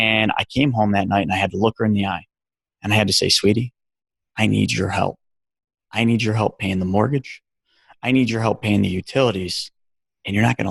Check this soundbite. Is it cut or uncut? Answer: uncut